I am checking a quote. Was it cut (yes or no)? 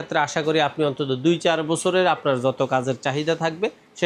no